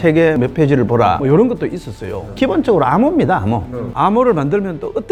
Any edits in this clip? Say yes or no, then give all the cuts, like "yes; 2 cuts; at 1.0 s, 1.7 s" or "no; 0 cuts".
no; 0 cuts